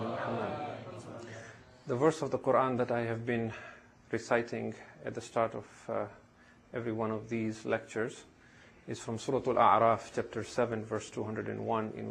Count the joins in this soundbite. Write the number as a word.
one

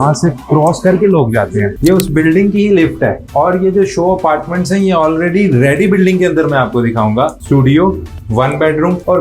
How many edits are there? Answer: one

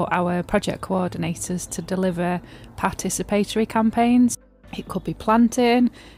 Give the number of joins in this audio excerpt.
one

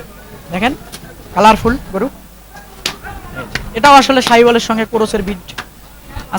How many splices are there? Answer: zero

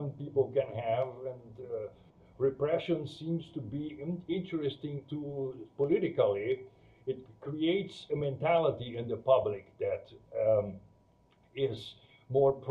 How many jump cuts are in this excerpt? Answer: zero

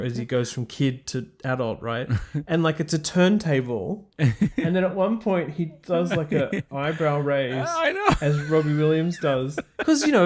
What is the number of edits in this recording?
one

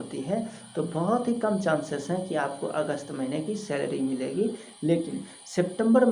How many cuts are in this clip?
zero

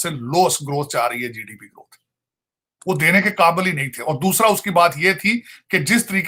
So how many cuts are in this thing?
zero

